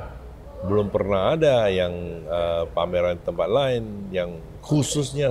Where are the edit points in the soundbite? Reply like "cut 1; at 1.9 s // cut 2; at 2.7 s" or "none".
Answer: none